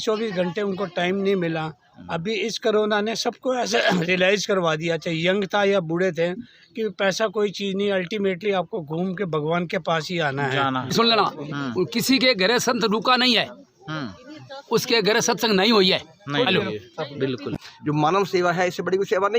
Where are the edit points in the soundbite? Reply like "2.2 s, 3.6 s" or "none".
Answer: 10.9 s, 17.6 s